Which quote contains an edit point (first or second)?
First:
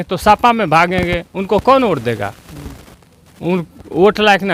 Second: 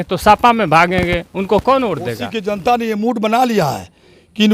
second